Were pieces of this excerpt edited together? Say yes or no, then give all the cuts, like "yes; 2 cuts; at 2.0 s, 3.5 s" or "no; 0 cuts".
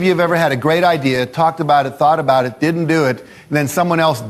no; 0 cuts